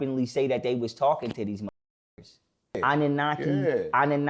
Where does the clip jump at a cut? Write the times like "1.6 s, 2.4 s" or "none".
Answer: 2.8 s